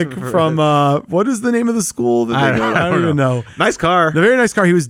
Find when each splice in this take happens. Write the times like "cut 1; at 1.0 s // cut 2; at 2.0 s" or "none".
none